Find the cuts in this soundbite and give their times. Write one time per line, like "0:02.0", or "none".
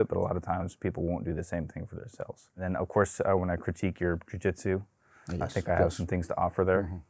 0:02.5